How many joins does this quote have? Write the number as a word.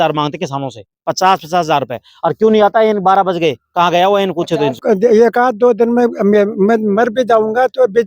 one